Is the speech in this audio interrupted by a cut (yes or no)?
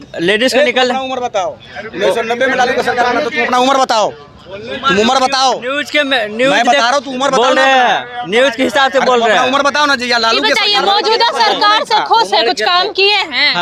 no